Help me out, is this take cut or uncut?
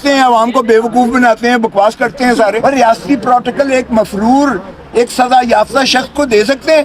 cut